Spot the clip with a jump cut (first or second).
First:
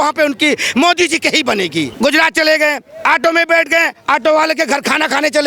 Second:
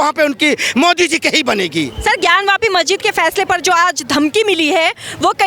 first